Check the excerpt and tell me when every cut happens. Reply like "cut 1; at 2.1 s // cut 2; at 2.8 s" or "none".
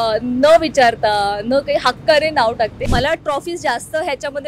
cut 1; at 2.8 s